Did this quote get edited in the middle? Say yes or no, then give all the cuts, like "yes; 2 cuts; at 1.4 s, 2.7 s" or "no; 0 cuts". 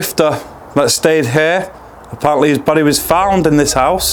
no; 0 cuts